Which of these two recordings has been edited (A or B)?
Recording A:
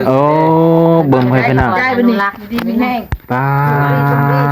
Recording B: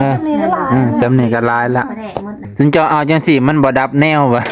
B